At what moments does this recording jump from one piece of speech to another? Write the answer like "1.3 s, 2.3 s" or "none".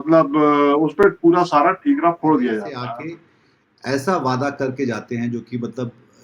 2.8 s